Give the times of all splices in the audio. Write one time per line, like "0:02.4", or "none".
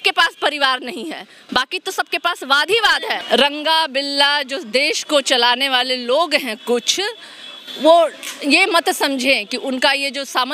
0:03.2